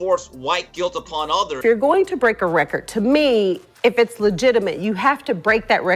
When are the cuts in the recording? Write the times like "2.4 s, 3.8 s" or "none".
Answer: 1.5 s